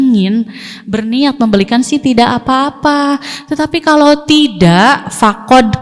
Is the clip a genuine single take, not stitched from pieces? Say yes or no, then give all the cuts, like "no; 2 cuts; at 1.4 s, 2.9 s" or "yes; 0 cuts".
yes; 0 cuts